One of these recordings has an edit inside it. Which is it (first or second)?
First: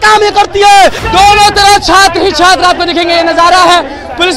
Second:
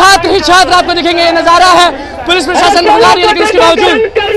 first